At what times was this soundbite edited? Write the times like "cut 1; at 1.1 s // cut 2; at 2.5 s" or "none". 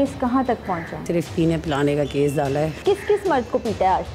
cut 1; at 1.1 s // cut 2; at 2.8 s